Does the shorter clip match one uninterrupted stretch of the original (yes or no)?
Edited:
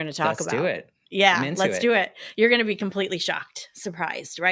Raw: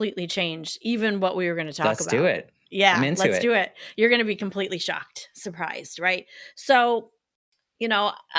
yes